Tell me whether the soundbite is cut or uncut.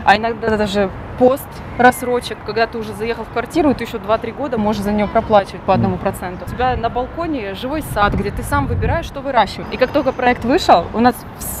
cut